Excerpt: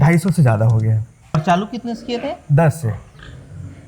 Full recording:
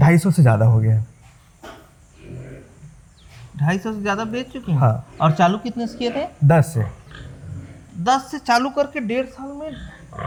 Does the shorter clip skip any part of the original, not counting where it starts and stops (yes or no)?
yes